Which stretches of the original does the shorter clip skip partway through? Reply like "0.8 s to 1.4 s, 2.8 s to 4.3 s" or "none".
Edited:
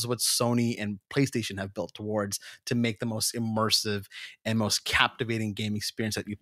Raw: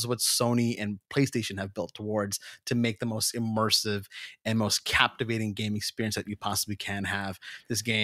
none